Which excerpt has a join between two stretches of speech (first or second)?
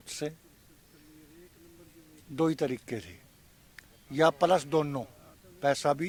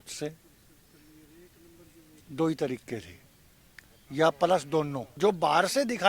second